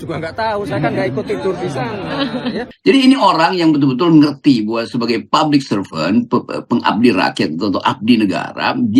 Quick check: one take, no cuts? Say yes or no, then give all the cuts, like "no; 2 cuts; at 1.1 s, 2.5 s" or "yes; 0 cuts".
no; 1 cut; at 2.6 s